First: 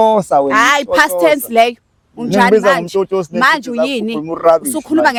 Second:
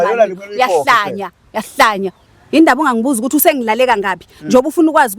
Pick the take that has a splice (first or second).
second